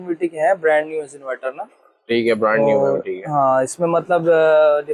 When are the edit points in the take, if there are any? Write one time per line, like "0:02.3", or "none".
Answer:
none